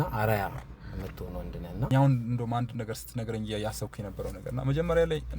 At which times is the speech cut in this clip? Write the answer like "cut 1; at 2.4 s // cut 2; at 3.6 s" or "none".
cut 1; at 1.9 s